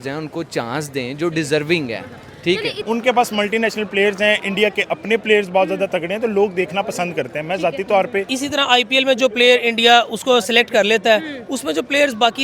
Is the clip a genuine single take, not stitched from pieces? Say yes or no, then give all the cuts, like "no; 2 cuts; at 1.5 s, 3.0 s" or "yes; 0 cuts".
no; 2 cuts; at 2.8 s, 8.3 s